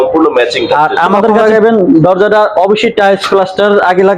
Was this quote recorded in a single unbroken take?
no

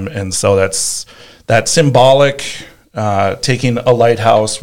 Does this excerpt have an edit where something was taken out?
no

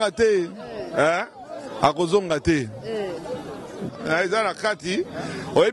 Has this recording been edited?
yes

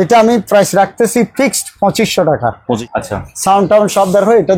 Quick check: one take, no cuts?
no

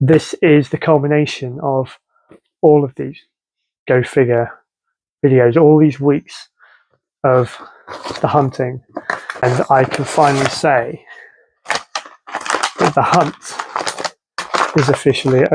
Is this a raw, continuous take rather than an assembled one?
no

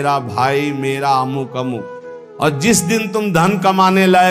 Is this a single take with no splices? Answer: no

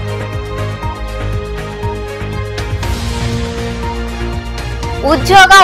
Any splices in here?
yes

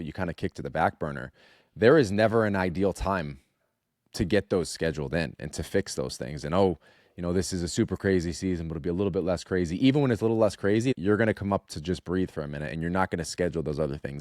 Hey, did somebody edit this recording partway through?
yes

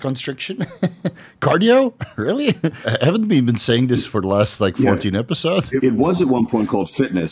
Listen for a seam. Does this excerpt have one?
yes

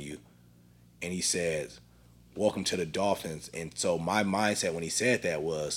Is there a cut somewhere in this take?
no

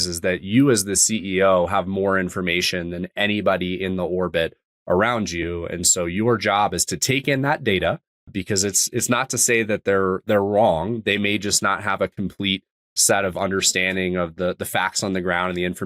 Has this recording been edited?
no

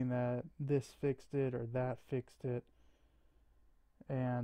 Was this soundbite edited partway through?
yes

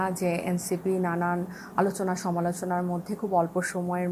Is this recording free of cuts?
yes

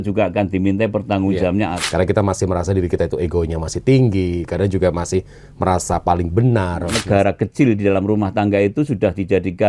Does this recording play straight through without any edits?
no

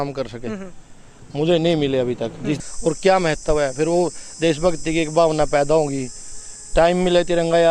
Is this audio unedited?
no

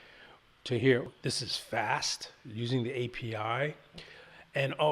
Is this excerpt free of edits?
no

